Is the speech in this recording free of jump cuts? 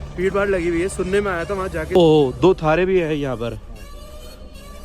no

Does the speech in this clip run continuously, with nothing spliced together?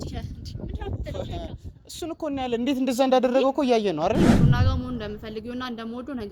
no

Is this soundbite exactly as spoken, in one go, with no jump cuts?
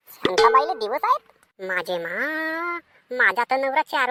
yes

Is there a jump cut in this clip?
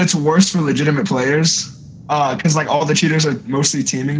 no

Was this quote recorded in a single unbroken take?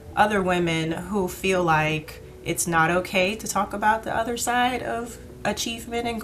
yes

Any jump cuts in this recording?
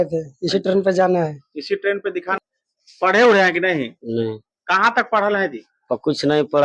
yes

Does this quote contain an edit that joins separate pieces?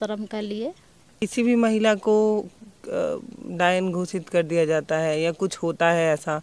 yes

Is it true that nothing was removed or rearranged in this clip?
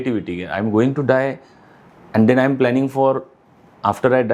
yes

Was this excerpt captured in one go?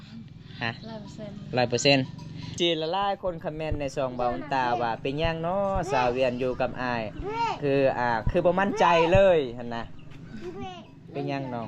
no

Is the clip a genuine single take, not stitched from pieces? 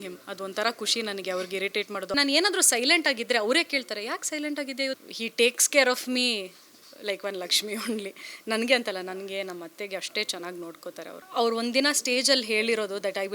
no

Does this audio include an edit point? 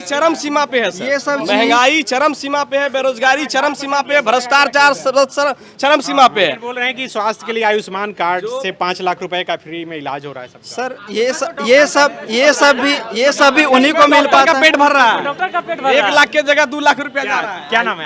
no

